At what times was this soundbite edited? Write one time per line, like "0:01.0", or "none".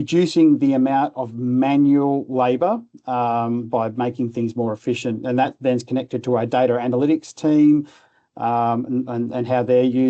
none